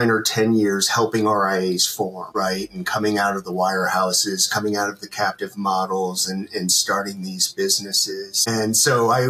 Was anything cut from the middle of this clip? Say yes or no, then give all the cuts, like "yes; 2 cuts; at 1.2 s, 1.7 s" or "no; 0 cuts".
no; 0 cuts